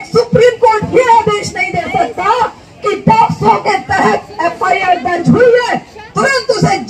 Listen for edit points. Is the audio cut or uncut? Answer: uncut